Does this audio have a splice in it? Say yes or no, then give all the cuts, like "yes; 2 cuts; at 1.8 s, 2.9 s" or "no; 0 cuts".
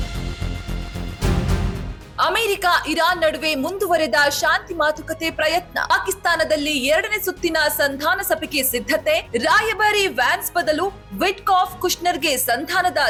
no; 0 cuts